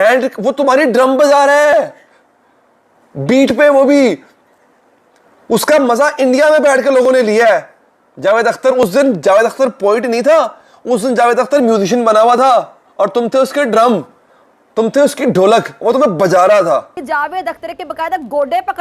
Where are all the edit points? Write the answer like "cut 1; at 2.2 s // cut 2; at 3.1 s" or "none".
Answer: cut 1; at 17.0 s